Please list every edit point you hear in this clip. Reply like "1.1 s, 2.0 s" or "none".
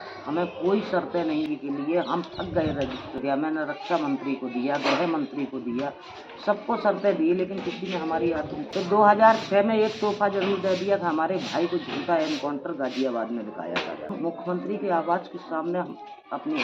1.5 s, 3.2 s, 8.6 s, 14.1 s